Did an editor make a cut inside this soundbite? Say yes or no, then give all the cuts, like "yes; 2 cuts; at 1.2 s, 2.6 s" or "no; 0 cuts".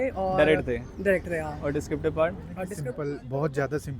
yes; 1 cut; at 2.7 s